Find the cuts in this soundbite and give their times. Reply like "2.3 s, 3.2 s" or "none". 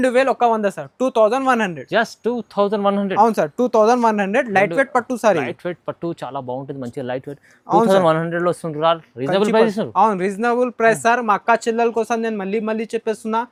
none